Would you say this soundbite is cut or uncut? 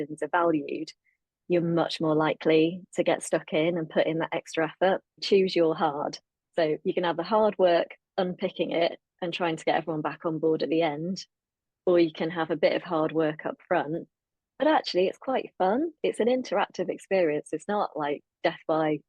cut